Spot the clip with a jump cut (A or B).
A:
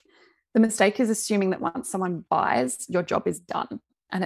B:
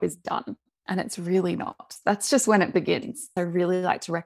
B